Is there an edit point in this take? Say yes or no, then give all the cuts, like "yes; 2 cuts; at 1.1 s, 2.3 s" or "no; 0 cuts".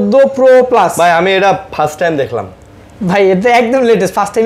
no; 0 cuts